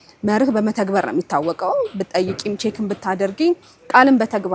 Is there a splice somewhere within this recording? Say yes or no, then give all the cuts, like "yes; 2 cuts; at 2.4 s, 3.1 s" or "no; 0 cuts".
no; 0 cuts